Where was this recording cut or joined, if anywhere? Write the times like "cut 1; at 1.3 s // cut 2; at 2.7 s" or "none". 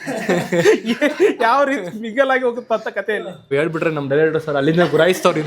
cut 1; at 3.4 s

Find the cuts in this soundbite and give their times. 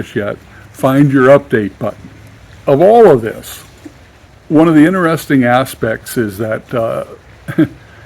cut 1; at 2.2 s

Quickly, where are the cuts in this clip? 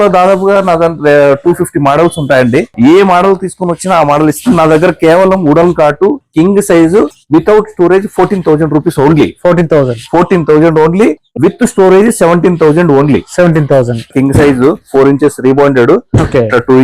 cut 1; at 2.7 s // cut 2; at 6.2 s // cut 3; at 7.2 s // cut 4; at 11.3 s // cut 5; at 14.1 s

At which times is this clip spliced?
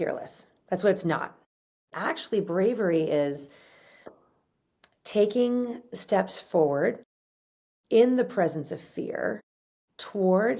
cut 1; at 1.9 s

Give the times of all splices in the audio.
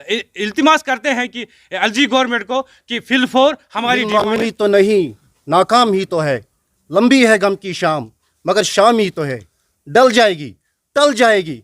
cut 1; at 4.4 s

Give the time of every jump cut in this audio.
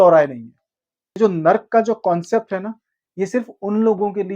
cut 1; at 1.2 s

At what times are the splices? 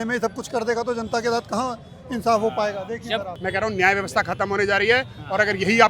cut 1; at 3.3 s

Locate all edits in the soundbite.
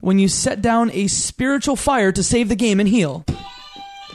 cut 1; at 3.2 s

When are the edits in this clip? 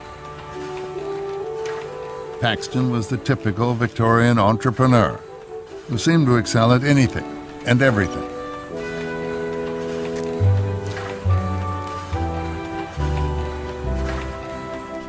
cut 1; at 10.3 s

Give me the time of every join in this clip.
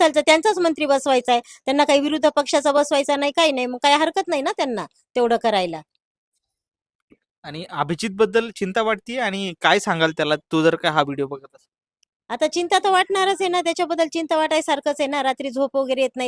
none

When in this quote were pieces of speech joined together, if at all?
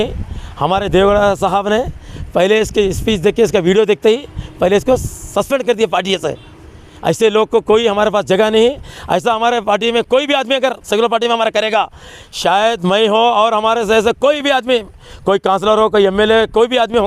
none

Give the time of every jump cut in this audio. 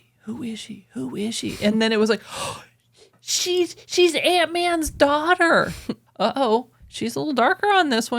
cut 1; at 6.0 s

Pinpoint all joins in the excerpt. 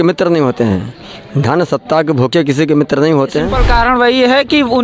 cut 1; at 3.6 s

